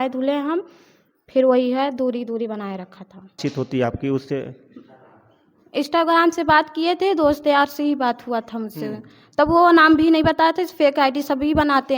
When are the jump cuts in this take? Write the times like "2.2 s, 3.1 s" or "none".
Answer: 3.4 s